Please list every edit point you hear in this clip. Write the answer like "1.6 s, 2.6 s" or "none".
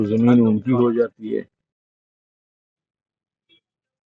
none